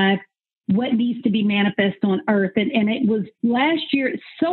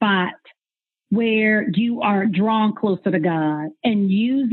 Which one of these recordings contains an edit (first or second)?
first